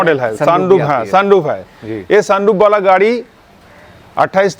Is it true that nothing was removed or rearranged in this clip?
yes; 0 cuts

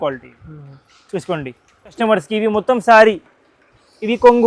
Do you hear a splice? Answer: yes; 1 cut; at 2.0 s

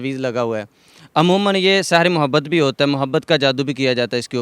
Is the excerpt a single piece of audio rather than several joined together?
yes; 0 cuts

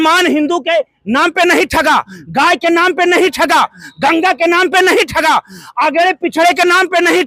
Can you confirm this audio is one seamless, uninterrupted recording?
yes; 0 cuts

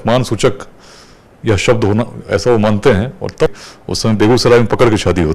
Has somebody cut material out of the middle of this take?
yes; 1 cut; at 3.5 s

